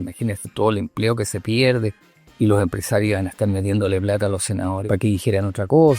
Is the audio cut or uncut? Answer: cut